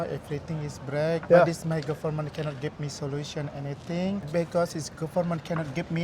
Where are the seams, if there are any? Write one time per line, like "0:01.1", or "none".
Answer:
0:01.2
0:04.3